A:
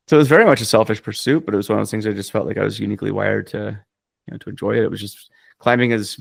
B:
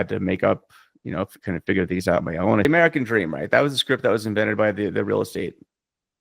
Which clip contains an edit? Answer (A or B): B